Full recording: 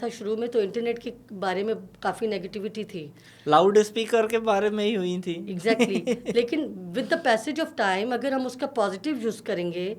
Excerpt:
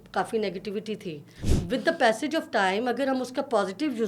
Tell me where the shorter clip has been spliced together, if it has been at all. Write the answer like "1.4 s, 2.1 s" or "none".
1.5 s